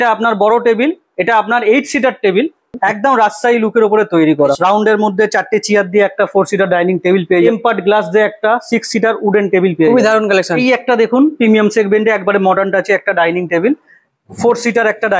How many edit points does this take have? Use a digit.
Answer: 4